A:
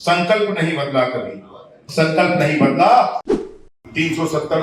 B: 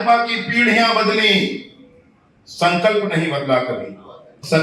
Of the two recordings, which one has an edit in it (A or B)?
A